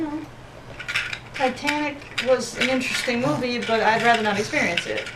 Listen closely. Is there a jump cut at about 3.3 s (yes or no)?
no